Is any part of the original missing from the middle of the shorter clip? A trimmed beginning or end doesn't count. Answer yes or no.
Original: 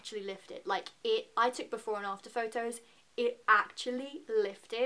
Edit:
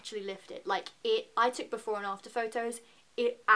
no